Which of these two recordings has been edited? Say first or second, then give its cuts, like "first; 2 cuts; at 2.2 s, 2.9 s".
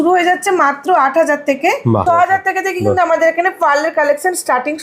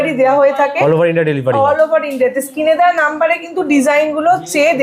first; 1 cut; at 2.0 s